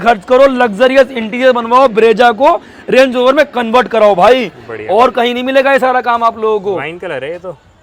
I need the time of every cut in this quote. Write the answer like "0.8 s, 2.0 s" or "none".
none